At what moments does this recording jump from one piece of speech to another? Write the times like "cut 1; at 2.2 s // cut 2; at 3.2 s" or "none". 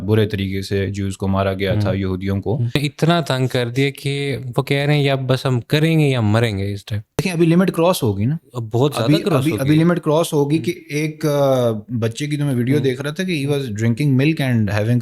cut 1; at 2.8 s // cut 2; at 7.2 s

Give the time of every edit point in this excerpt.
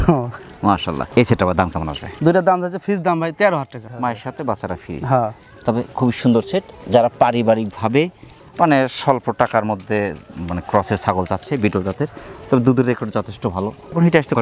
none

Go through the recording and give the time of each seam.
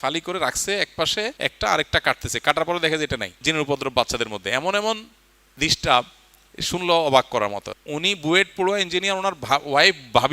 cut 1; at 1.3 s // cut 2; at 3.3 s // cut 3; at 7.7 s

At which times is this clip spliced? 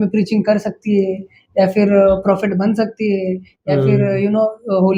none

